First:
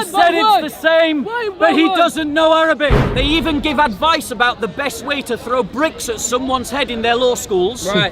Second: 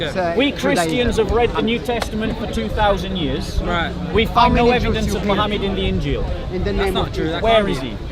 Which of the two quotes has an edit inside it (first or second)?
first